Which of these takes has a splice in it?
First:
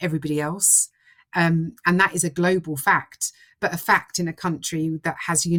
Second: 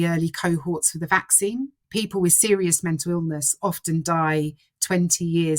second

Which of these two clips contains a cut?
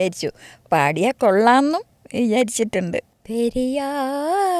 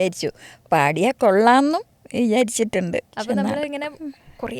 first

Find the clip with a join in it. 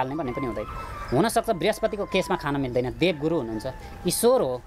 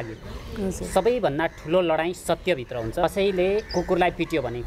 second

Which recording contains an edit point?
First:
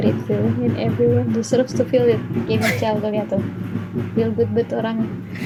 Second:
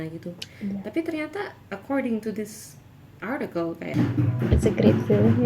second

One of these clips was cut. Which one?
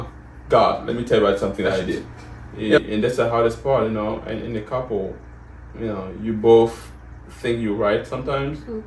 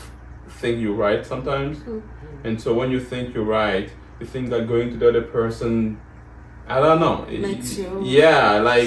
first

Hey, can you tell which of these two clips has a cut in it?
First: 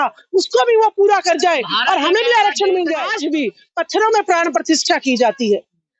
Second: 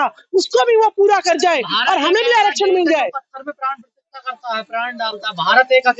first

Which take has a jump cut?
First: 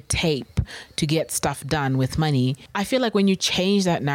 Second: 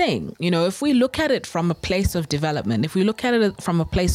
first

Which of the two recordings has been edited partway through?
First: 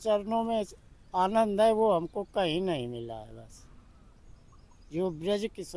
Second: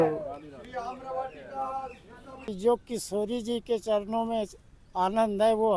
second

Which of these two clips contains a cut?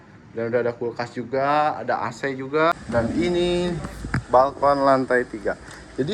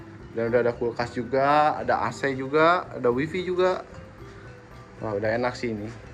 first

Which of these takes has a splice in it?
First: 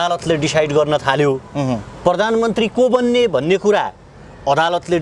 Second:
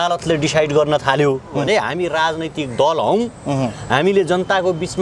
second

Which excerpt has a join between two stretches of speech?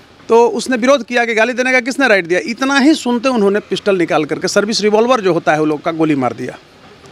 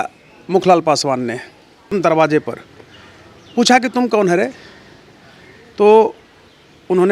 second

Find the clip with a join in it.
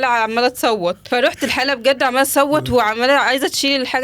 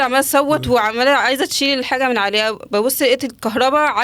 first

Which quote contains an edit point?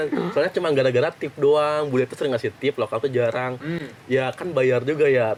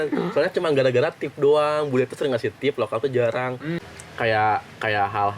second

